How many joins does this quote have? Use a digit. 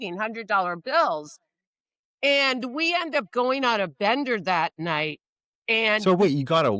0